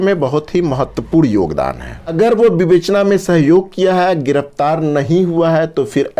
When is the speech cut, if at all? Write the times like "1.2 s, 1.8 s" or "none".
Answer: 2.0 s